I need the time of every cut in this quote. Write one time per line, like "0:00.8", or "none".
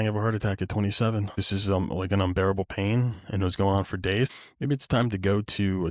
0:01.4
0:04.3